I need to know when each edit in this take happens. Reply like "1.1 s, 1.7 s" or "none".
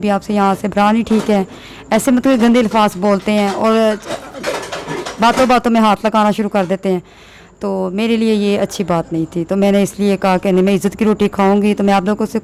none